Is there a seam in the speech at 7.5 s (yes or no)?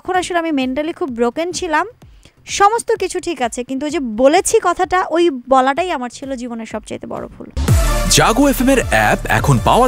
yes